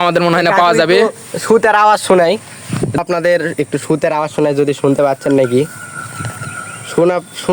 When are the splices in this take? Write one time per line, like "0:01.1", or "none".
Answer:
0:03.0